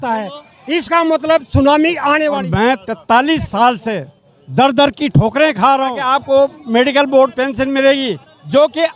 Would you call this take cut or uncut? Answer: cut